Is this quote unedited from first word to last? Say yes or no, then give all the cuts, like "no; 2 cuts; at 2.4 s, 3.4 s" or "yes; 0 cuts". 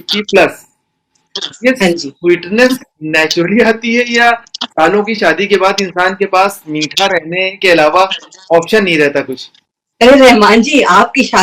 yes; 0 cuts